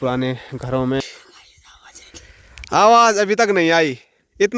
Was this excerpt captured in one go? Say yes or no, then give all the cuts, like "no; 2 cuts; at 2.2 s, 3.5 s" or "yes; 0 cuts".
no; 1 cut; at 1.0 s